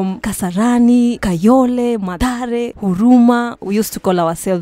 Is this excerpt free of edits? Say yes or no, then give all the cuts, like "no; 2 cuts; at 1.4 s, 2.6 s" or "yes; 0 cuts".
no; 3 cuts; at 1.2 s, 2.1 s, 3.6 s